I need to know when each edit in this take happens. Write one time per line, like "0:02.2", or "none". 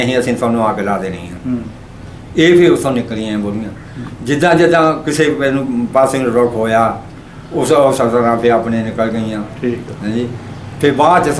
none